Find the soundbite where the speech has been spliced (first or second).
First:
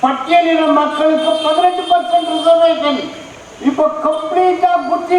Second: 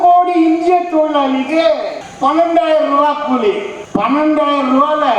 second